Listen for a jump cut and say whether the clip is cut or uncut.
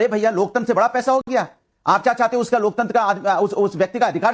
uncut